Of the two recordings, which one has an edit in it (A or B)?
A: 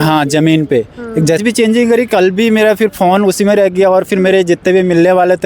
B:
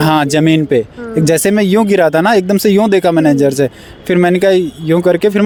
A